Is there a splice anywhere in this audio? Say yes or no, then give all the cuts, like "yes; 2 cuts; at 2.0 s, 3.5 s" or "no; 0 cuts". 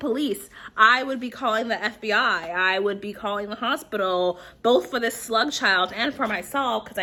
no; 0 cuts